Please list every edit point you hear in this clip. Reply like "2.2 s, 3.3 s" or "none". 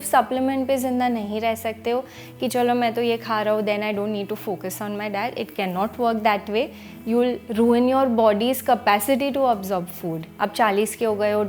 10.3 s